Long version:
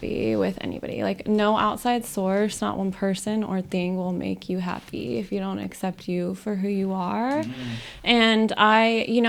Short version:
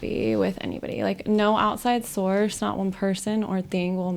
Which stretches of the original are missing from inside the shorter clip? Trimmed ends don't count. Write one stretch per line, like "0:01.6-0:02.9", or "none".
none